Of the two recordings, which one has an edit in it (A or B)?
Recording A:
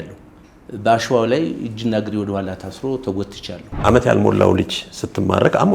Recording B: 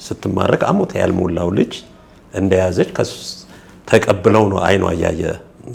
A